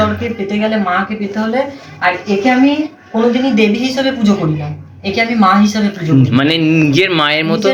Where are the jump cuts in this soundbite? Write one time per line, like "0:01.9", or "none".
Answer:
none